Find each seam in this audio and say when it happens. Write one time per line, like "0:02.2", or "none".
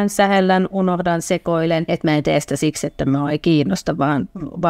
0:01.8